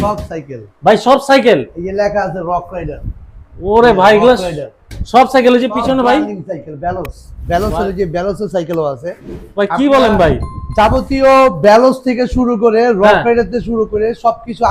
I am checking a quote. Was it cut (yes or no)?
no